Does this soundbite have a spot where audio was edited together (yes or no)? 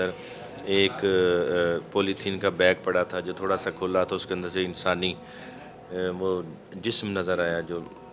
no